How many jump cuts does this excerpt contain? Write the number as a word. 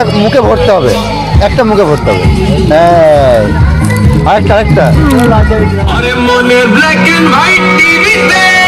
one